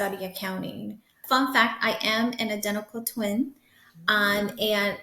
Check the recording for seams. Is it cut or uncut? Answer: cut